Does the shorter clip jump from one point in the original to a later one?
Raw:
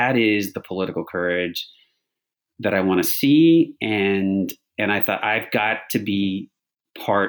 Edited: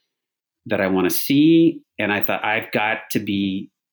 yes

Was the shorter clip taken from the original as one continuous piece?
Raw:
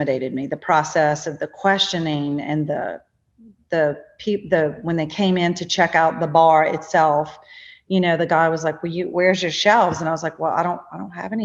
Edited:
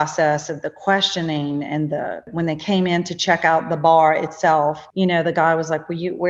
no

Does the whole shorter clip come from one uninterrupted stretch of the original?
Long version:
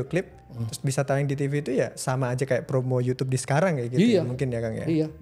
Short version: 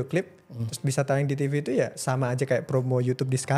yes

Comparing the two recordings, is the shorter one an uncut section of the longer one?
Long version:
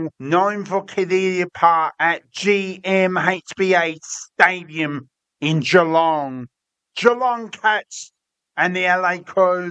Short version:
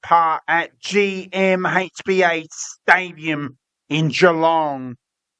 yes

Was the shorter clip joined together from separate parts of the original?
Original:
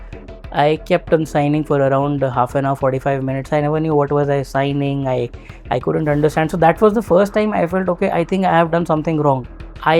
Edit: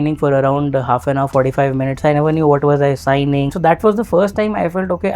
yes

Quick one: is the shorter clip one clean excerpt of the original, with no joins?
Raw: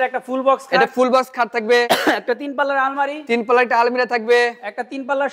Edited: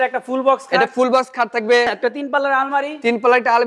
no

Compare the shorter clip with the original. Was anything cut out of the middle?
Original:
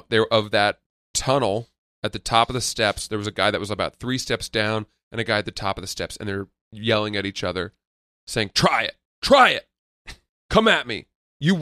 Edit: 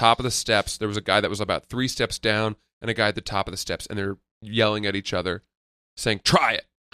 no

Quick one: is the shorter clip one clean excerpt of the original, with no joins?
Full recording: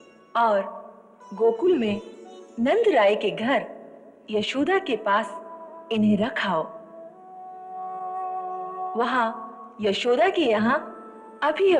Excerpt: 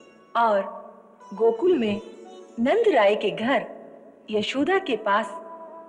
yes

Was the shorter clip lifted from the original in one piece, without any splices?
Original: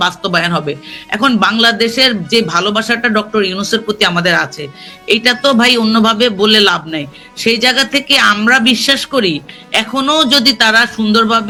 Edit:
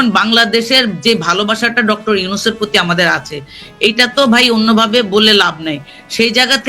yes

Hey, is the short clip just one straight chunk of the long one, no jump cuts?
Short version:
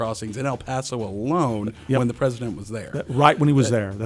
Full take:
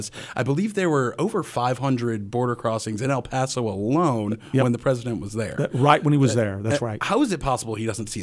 yes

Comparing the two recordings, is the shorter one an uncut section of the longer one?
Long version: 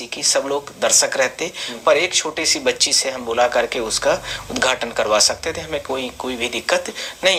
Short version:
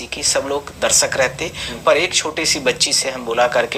yes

